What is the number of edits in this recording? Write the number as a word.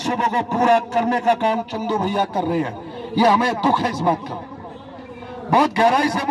zero